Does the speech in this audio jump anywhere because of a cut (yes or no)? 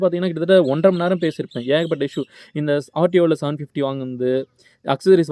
no